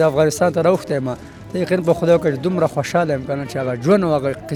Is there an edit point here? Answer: no; 0 cuts

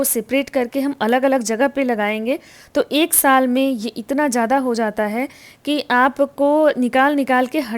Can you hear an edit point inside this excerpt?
no; 0 cuts

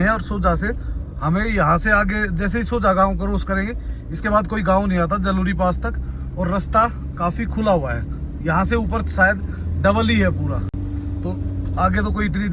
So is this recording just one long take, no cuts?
yes; 0 cuts

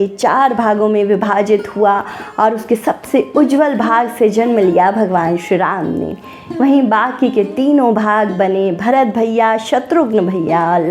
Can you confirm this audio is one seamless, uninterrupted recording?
yes; 0 cuts

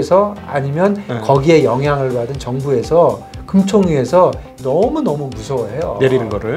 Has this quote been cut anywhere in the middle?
yes; 1 cut; at 4.5 s

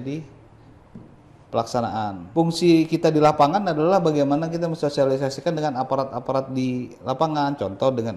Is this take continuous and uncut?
no; 1 cut; at 2.2 s

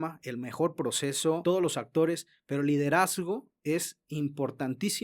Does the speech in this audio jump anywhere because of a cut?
yes; 1 cut; at 1.4 s

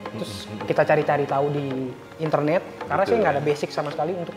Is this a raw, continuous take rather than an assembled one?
no; 1 cut; at 2.8 s

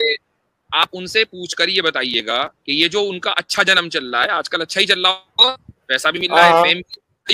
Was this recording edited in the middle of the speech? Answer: yes; 1 cut; at 2.6 s

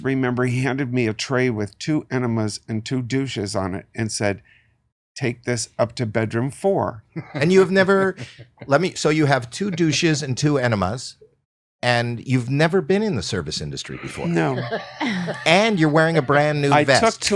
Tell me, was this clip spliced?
no; 0 cuts

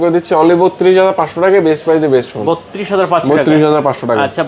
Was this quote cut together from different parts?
no; 0 cuts

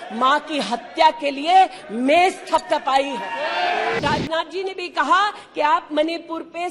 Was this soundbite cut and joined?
yes; 1 cut; at 4.0 s

